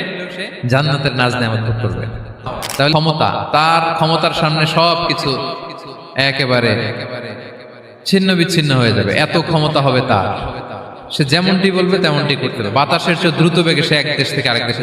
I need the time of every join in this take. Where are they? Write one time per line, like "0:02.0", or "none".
0:02.9

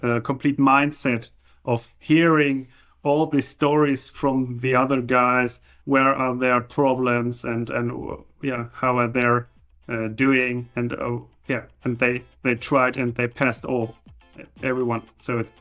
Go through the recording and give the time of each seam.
0:05.7
0:14.6

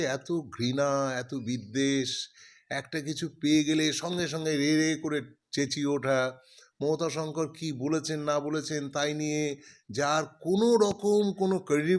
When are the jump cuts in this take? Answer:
none

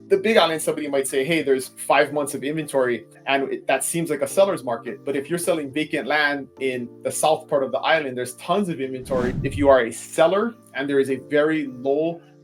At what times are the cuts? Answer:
0:09.4

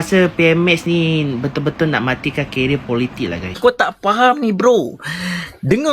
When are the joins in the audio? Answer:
0:03.5

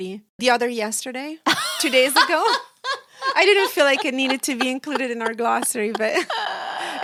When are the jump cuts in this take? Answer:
none

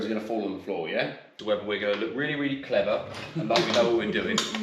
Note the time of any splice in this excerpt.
0:01.3

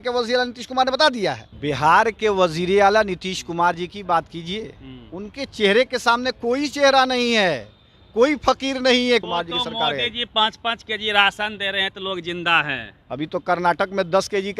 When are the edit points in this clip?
0:01.5
0:09.2

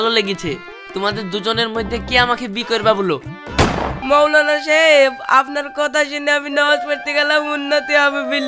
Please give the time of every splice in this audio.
0:04.0

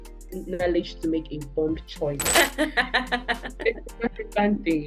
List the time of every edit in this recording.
0:02.3

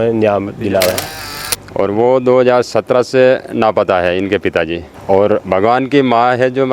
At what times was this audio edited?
0:01.2
0:04.9

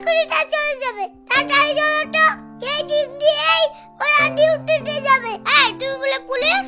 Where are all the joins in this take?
none

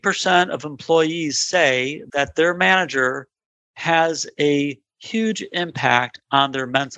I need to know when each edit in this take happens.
none

